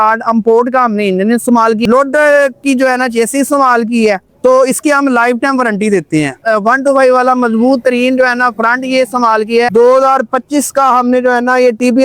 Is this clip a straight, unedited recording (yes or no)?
no